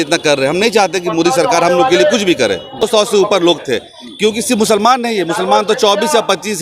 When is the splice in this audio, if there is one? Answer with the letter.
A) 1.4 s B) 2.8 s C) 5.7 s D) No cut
B